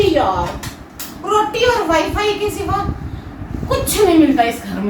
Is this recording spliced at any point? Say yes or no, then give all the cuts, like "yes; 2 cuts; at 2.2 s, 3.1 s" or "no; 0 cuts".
no; 0 cuts